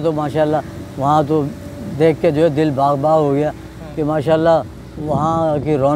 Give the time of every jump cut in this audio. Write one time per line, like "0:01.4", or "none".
none